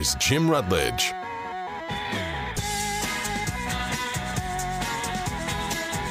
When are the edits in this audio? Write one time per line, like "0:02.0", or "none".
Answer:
none